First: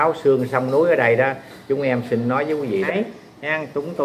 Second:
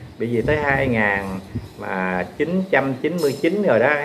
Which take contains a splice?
first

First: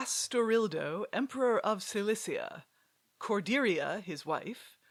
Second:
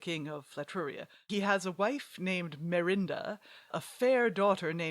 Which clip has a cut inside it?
second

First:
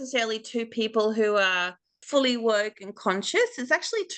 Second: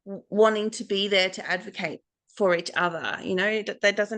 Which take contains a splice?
first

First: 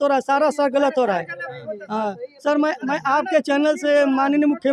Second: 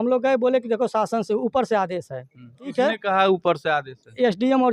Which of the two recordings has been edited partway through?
second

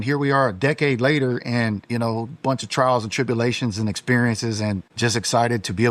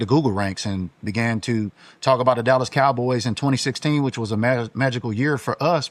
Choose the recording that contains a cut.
first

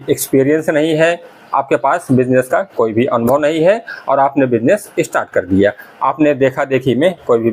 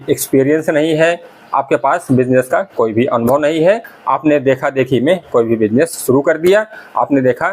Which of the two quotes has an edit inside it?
second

